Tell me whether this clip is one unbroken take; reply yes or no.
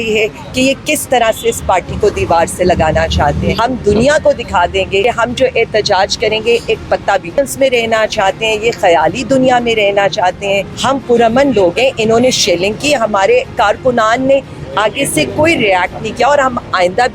no